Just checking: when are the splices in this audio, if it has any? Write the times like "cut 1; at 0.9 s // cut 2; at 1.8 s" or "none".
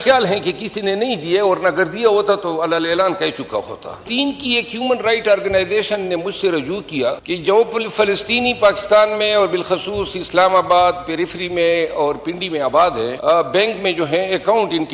cut 1; at 4.0 s // cut 2; at 7.2 s // cut 3; at 13.2 s